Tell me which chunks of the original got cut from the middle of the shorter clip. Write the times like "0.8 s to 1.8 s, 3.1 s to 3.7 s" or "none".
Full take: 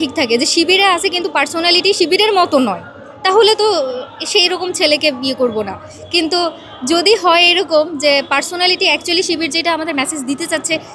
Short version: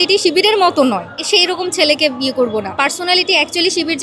2.9 s to 4.1 s, 5.8 s to 8.3 s